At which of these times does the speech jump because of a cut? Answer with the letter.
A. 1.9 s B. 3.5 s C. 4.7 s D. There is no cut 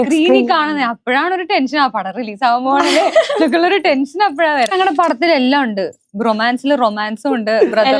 C